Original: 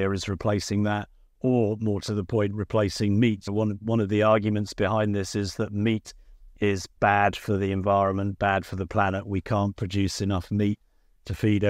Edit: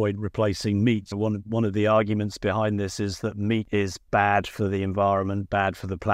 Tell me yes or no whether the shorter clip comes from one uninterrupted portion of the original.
no